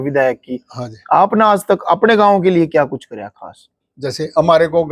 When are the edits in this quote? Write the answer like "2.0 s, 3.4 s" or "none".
none